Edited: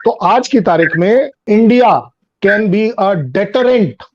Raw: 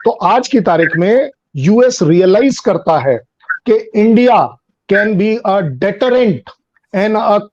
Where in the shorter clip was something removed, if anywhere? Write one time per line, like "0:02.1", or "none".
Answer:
0:01.4